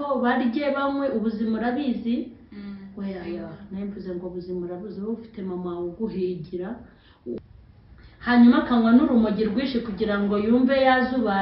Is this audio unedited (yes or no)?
no